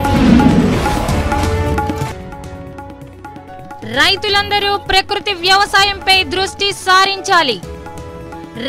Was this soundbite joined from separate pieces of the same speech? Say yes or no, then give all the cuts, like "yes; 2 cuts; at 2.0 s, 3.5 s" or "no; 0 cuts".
yes; 2 cuts; at 2.1 s, 3.8 s